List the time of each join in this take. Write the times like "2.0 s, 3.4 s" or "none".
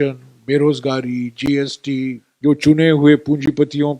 2.3 s